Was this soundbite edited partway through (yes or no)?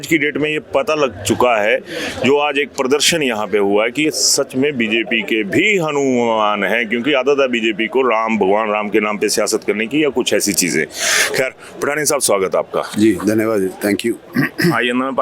no